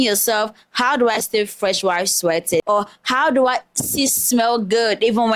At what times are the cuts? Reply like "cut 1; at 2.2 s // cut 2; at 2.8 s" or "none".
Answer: cut 1; at 2.7 s